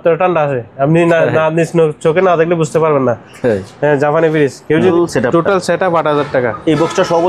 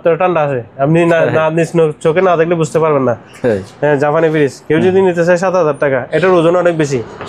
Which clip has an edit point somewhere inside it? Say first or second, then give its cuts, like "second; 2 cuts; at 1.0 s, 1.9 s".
first; 1 cut; at 4.9 s